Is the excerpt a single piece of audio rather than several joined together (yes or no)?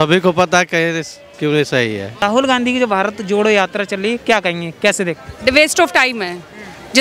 no